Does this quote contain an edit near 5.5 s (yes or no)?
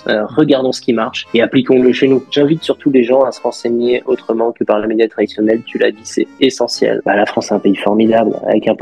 no